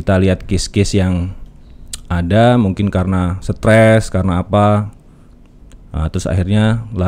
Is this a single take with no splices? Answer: yes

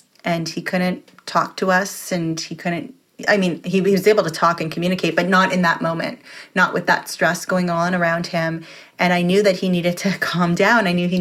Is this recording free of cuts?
yes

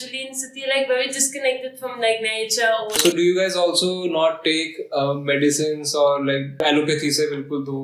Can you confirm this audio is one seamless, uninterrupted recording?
no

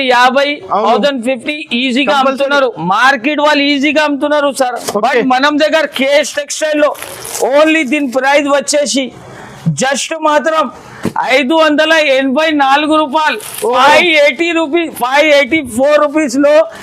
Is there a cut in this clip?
no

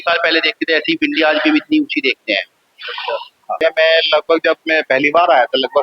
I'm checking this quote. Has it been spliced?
yes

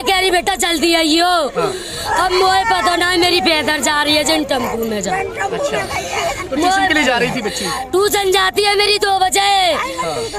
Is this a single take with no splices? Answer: yes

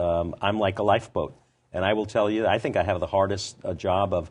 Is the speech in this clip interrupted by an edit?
no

